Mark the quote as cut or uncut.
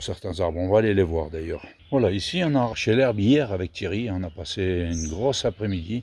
uncut